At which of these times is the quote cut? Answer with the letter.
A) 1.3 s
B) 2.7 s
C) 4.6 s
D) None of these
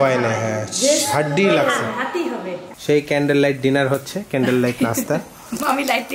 B